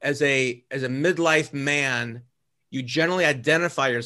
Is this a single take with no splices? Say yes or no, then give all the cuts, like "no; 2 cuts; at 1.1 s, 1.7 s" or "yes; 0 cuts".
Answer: yes; 0 cuts